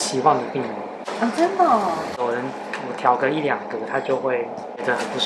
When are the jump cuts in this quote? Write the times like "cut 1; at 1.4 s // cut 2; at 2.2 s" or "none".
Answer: none